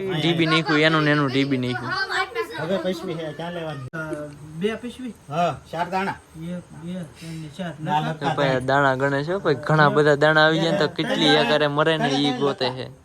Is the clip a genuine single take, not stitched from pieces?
no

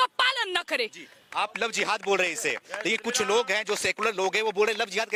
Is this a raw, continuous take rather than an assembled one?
yes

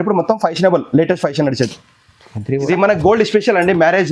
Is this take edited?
yes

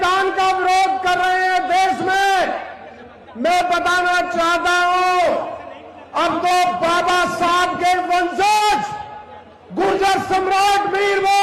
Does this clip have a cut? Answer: no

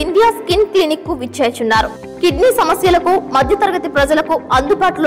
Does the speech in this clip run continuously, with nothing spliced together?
yes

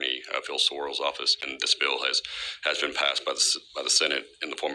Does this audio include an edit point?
yes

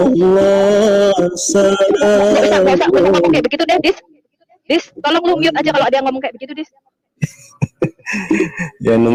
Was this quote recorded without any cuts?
yes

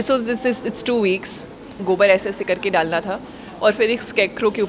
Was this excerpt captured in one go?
no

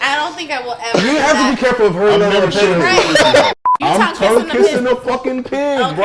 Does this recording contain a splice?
yes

